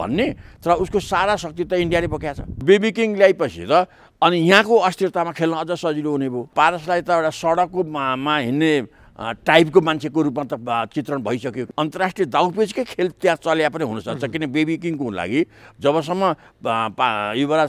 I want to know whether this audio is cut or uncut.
cut